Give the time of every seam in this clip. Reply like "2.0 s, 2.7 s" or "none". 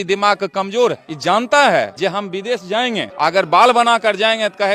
1.1 s, 1.9 s, 3.1 s